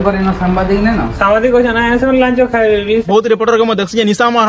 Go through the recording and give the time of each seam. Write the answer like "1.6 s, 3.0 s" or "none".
3.0 s